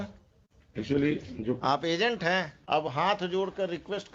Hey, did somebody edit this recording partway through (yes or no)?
yes